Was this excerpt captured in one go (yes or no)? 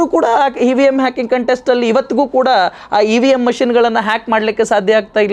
yes